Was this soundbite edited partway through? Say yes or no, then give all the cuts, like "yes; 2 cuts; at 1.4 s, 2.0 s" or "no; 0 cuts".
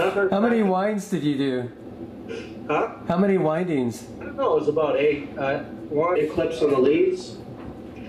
no; 0 cuts